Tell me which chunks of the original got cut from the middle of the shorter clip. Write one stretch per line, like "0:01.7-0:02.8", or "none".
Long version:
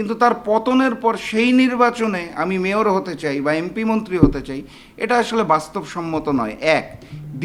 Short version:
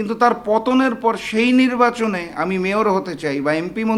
none